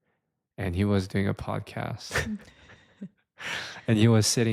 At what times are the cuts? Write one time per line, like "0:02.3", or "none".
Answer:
none